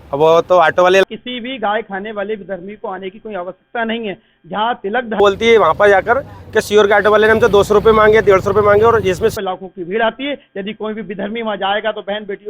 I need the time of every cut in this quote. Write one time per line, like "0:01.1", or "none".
0:01.0
0:05.2
0:09.3

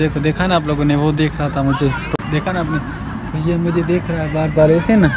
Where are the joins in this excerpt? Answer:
none

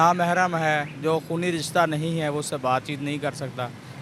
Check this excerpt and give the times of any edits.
none

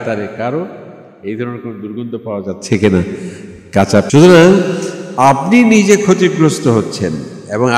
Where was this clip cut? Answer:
0:04.1

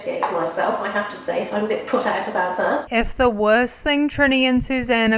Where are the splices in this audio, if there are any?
0:02.9

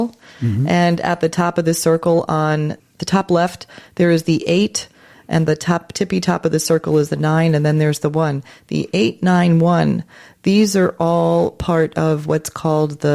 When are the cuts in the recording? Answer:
0:02.9

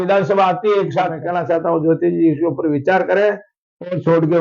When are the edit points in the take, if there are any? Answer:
0:01.2

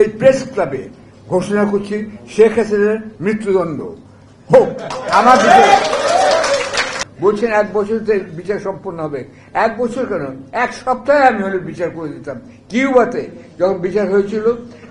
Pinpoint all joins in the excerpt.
0:06.9

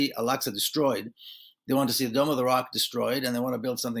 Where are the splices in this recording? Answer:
none

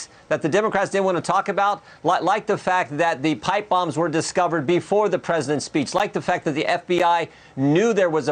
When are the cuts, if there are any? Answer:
none

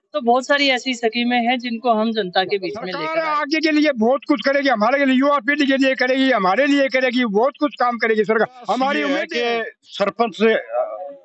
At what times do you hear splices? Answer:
0:03.0
0:09.2

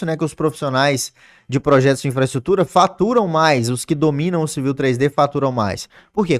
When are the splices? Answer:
none

